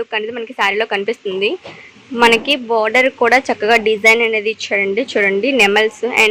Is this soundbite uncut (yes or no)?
yes